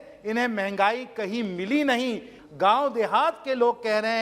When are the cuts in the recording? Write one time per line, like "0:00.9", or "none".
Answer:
0:02.3

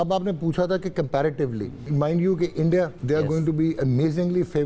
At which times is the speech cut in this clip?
0:01.8
0:03.0

